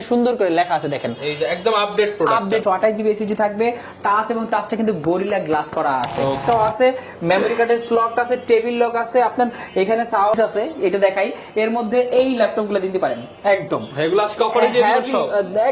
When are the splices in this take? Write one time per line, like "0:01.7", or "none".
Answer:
0:02.6
0:06.4
0:10.4